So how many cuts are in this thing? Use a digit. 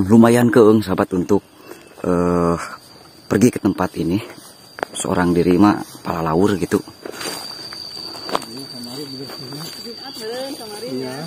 1